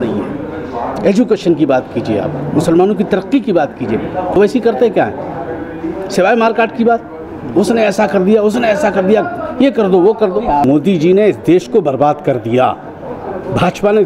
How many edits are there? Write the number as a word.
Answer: two